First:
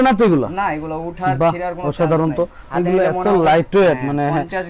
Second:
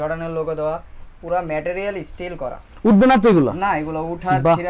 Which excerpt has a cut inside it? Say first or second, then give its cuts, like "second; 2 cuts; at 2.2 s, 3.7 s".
first; 1 cut; at 2.6 s